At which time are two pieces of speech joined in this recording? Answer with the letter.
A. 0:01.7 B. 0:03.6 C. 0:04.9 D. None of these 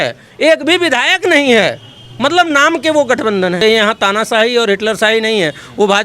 B